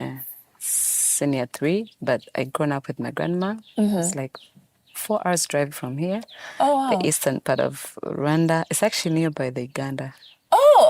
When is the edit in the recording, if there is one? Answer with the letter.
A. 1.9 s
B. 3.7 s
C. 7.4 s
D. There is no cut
A